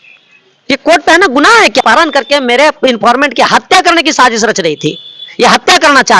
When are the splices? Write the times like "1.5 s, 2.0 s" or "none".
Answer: none